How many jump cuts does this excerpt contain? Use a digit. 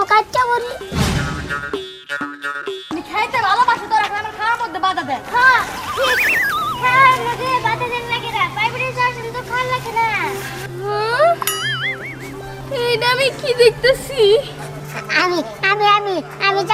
1